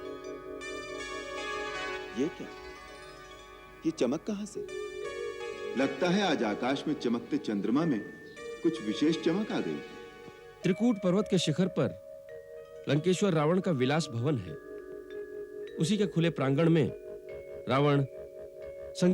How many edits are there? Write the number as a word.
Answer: one